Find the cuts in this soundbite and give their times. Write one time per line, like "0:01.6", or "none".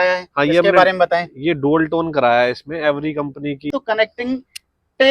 0:03.7